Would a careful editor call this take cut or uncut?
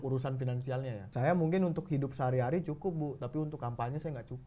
cut